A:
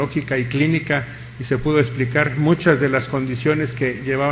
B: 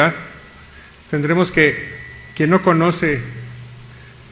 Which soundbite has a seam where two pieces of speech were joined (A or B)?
A